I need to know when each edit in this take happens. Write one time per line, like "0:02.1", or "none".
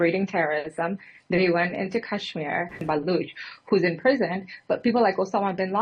0:02.8

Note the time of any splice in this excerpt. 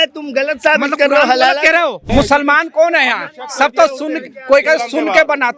0:02.0

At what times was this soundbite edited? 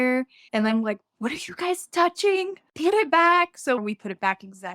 0:02.6
0:03.8

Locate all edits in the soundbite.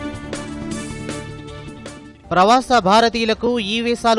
0:02.1

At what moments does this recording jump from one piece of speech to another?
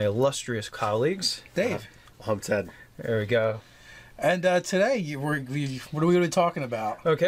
none

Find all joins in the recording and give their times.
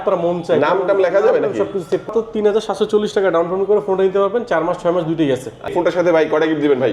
0:02.1
0:05.7

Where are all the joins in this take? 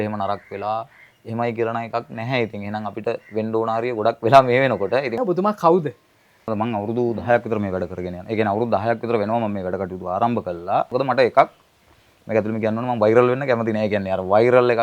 0:05.2
0:06.5
0:10.9

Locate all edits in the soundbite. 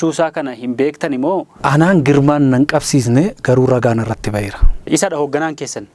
0:01.6
0:04.8

